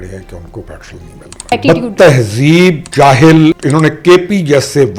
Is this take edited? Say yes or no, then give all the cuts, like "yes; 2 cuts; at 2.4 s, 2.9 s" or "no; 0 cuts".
yes; 3 cuts; at 1.5 s, 2.8 s, 3.6 s